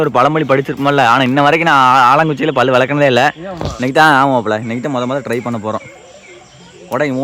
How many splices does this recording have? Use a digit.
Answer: 0